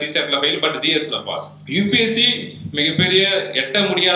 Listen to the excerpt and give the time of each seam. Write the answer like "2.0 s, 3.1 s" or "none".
1.5 s